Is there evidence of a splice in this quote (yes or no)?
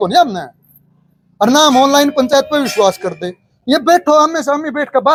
no